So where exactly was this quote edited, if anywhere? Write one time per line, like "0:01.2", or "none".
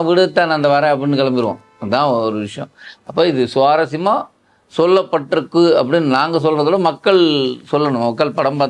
none

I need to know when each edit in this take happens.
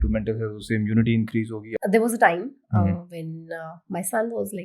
0:01.7

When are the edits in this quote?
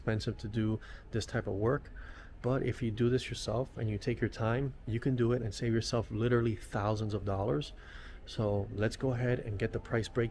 none

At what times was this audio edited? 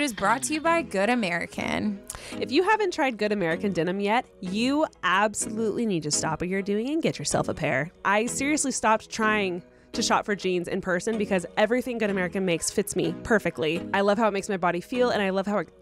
0:08.0

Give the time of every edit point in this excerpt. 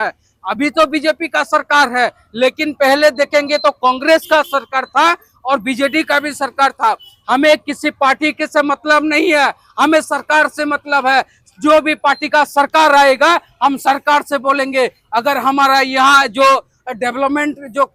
none

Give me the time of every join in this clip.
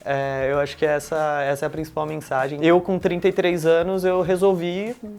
0:02.5

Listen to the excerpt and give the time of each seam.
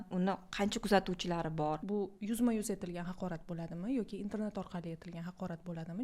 0:01.8

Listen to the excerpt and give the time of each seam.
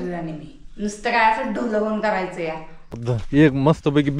0:03.1

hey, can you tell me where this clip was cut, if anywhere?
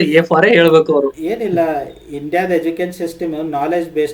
0:01.2

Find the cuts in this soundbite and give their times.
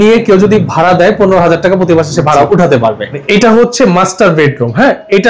0:03.2

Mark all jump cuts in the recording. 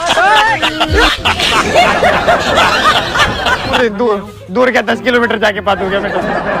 0:03.8

